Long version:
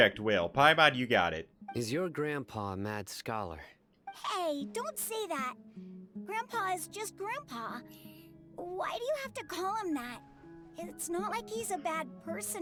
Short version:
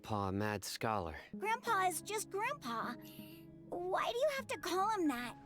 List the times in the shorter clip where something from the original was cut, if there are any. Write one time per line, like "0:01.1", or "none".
0:01.2